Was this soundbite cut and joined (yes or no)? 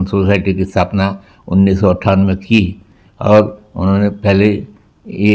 no